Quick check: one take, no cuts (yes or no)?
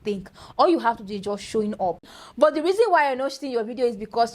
no